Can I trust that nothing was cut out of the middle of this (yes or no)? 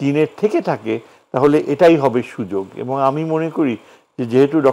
yes